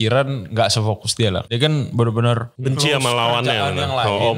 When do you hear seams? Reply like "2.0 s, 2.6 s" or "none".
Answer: 1.4 s, 2.5 s

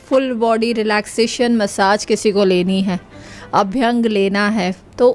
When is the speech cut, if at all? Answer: none

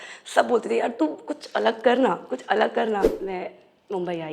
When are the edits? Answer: 3.2 s

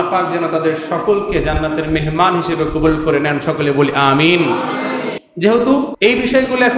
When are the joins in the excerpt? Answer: 5.2 s, 5.9 s

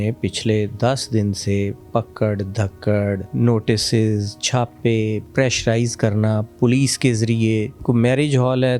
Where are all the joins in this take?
3.3 s, 5.2 s, 6.5 s, 7.8 s

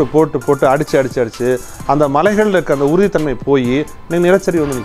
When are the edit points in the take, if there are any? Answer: none

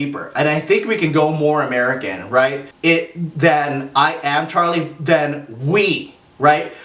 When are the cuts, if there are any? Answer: 2.7 s

